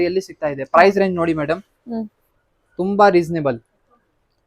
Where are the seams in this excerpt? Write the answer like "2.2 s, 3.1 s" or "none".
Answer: none